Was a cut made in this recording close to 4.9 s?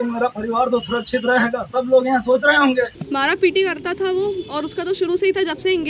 no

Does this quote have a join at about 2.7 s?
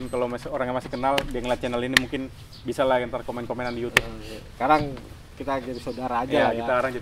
no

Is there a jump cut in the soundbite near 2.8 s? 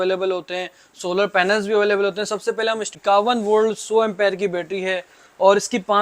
yes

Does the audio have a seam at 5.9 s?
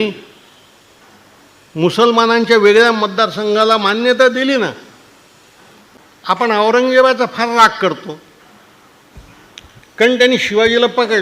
yes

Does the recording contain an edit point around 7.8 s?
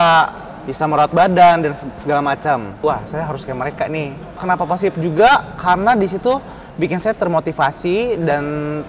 no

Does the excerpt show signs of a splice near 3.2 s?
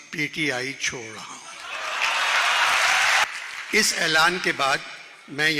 yes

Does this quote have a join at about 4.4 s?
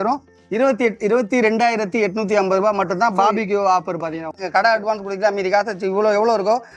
yes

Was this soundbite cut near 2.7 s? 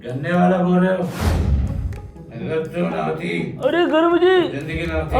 no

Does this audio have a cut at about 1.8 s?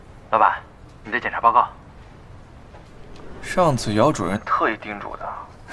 no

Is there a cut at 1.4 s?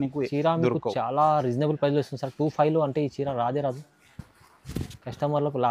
no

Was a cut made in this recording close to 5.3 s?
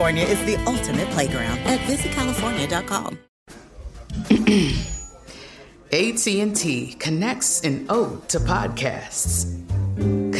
no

